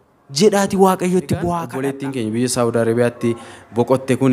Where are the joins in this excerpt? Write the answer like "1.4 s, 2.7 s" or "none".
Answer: 1.7 s